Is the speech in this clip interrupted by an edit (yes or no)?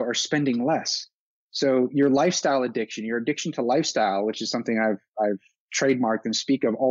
no